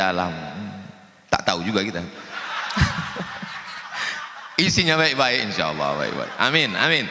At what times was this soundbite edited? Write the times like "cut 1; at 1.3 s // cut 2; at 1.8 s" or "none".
none